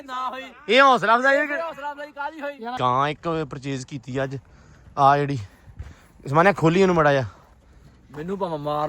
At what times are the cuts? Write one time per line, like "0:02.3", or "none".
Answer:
0:02.8